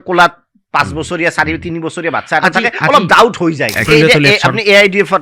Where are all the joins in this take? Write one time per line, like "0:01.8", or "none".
0:03.9